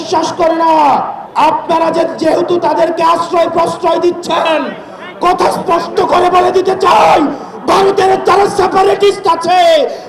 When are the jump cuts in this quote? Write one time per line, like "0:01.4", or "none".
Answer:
0:01.2